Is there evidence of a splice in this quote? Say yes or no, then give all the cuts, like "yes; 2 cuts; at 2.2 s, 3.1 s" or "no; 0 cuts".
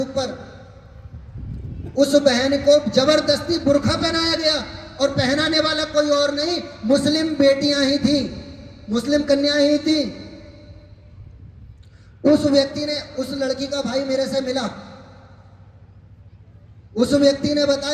no; 0 cuts